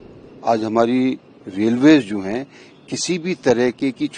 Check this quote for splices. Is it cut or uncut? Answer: uncut